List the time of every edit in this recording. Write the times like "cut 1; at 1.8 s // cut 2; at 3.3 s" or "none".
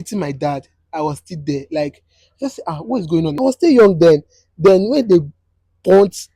cut 1; at 3.3 s